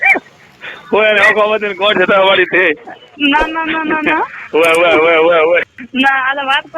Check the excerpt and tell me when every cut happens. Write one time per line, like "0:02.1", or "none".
0:05.8